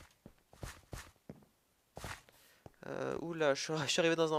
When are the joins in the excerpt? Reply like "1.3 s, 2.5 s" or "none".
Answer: none